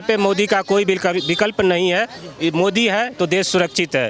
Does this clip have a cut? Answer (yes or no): no